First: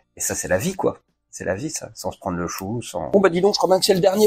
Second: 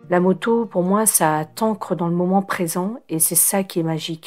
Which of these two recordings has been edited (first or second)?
first